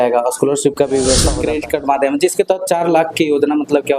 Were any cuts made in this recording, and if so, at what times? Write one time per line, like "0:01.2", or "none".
0:01.3